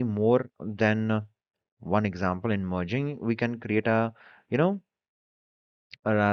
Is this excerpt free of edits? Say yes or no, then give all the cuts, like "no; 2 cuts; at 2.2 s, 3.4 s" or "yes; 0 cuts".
yes; 0 cuts